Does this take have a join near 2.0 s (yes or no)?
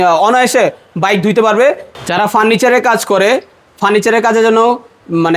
yes